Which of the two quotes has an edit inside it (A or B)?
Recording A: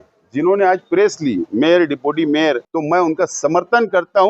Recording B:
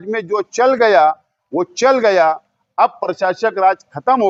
A